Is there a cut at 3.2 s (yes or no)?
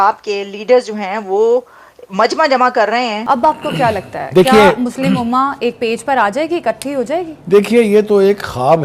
yes